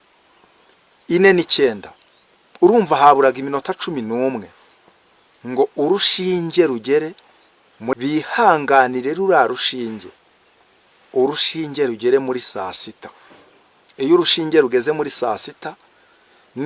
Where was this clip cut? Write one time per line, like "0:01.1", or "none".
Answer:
0:08.0